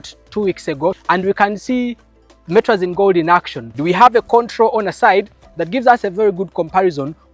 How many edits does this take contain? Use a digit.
2